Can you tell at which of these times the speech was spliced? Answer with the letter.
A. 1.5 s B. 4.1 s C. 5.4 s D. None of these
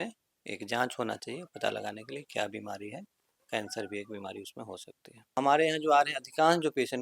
C